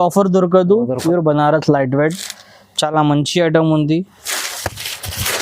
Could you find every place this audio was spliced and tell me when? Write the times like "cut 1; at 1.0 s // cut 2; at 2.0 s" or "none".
cut 1; at 1.0 s